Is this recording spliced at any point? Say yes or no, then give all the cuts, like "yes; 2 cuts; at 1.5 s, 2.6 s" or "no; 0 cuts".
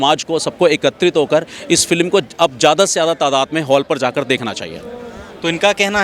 no; 0 cuts